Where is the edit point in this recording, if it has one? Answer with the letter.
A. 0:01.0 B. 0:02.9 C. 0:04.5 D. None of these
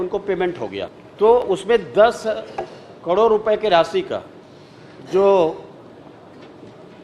A